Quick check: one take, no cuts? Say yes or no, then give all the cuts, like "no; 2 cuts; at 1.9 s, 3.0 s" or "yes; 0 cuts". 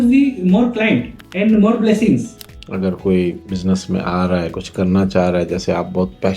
no; 3 cuts; at 1.2 s, 2.4 s, 3.5 s